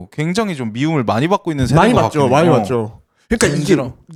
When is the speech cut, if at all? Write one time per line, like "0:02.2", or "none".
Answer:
none